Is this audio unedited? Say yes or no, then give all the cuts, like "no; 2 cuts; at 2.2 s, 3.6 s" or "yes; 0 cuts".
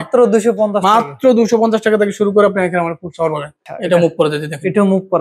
no; 1 cut; at 3.5 s